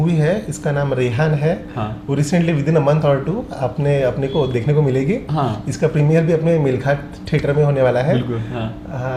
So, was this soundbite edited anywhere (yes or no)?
no